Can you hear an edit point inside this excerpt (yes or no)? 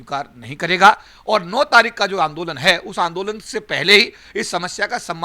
yes